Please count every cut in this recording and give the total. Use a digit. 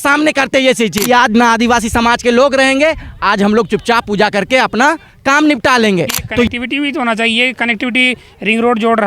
2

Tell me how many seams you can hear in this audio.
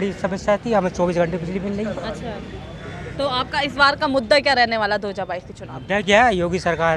0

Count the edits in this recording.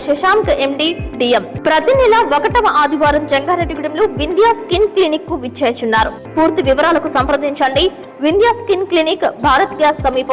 2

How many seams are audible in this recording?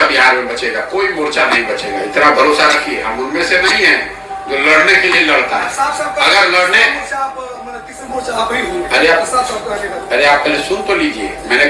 0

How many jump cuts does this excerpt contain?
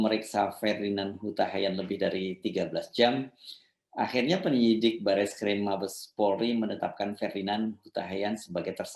0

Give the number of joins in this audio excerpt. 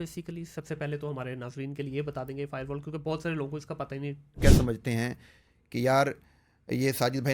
1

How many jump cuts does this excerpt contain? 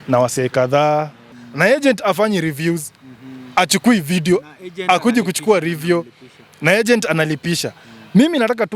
1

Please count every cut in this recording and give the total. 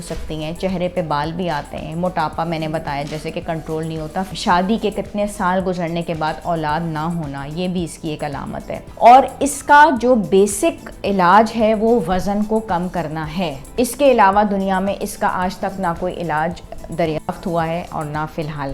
3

